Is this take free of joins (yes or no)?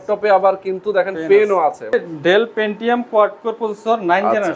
no